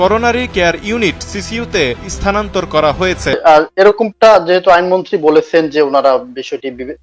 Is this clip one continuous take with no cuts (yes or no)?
no